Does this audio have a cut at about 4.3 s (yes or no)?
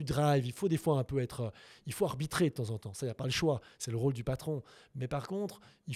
no